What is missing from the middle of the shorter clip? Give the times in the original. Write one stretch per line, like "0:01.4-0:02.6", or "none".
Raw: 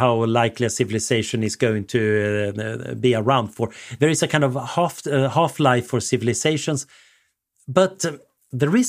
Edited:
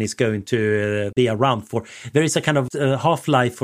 0:02.5-0:03.0
0:04.6-0:05.0